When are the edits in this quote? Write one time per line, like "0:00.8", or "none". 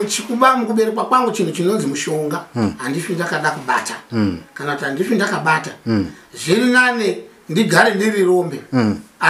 none